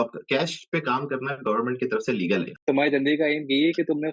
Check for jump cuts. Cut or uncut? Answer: cut